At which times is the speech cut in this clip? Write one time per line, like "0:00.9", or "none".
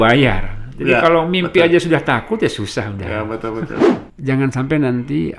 0:03.9